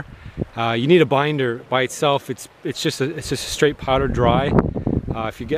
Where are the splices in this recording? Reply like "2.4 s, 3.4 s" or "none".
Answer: 2.9 s